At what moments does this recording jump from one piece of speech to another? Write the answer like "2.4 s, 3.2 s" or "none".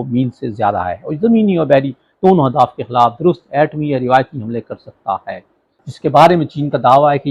5.8 s